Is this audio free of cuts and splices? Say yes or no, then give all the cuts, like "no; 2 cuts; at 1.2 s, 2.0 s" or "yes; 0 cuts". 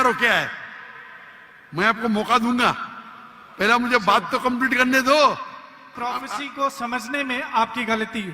no; 1 cut; at 5.9 s